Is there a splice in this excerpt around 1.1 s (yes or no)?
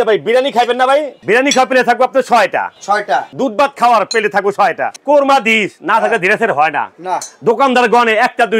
yes